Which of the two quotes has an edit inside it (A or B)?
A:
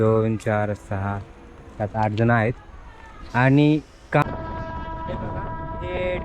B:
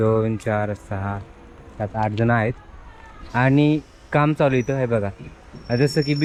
A